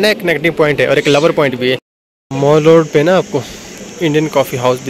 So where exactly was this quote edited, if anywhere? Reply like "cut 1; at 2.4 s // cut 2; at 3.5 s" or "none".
cut 1; at 1.5 s